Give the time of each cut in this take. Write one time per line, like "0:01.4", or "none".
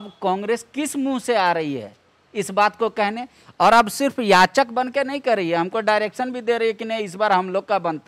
none